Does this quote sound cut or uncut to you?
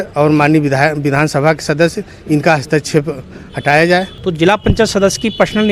cut